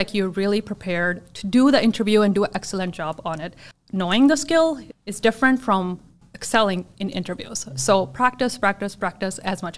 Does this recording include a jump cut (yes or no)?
yes